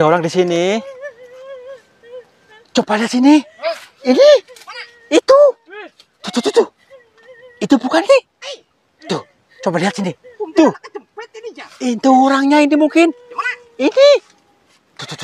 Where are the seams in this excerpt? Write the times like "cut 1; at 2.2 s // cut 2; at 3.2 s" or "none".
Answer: none